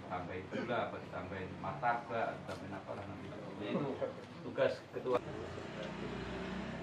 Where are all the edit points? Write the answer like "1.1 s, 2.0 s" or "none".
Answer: 5.2 s